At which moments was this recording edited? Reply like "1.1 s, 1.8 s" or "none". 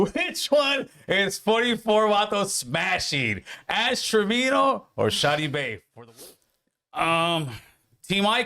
5.8 s